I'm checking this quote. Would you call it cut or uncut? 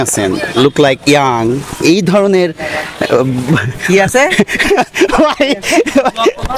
uncut